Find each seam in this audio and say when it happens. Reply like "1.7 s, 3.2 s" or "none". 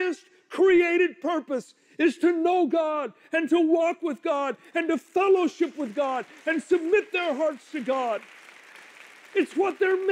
none